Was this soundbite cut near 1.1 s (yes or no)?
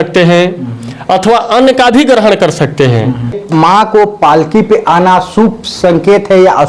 no